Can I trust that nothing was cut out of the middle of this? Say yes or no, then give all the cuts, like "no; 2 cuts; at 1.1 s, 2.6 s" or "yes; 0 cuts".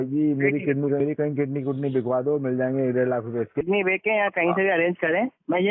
no; 2 cuts; at 1.0 s, 3.6 s